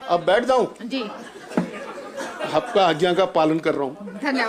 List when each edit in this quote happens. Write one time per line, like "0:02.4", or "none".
none